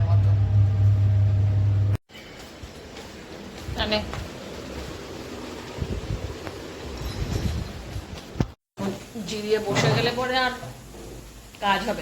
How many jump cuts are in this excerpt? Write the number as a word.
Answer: one